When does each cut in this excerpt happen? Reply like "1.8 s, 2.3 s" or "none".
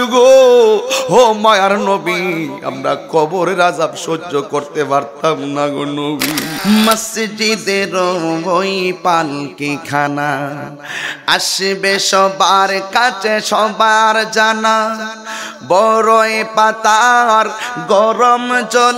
6.5 s